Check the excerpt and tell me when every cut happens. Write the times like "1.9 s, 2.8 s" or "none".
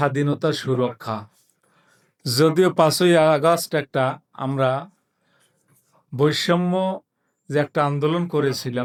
none